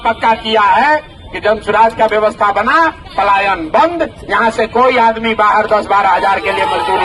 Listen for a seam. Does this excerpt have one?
no; 0 cuts

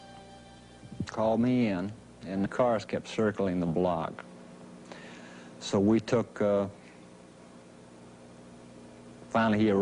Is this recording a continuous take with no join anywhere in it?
yes; 0 cuts

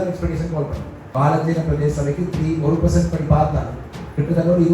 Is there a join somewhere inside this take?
yes; 1 cut; at 0.9 s

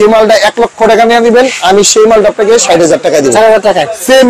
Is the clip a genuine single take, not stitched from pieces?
yes; 0 cuts

